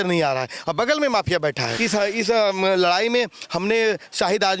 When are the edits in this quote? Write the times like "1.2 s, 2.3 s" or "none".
1.7 s